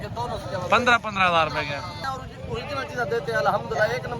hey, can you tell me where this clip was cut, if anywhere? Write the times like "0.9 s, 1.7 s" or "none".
2.0 s